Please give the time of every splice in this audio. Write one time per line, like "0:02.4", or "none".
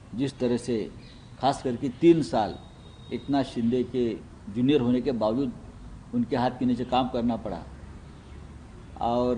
none